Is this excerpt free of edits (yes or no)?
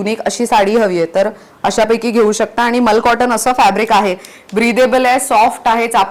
yes